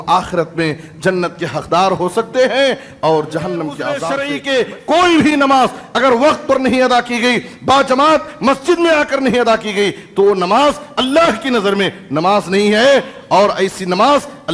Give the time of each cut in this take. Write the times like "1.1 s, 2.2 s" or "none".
3.9 s